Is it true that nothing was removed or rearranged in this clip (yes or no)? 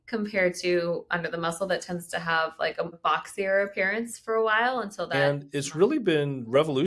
no